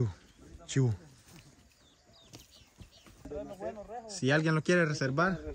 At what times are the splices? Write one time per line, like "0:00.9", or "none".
0:03.3